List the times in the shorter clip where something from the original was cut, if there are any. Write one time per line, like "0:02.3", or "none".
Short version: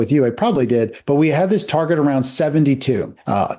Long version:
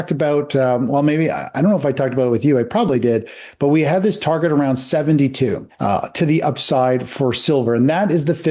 0:01.0